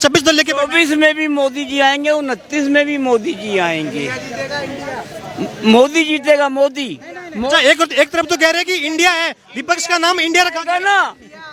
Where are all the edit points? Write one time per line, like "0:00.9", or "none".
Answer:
none